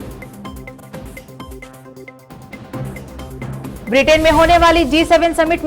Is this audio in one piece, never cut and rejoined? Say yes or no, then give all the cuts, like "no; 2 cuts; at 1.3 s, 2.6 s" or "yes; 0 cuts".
no; 2 cuts; at 0.8 s, 3.8 s